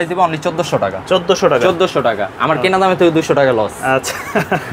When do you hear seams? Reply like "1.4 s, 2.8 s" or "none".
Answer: none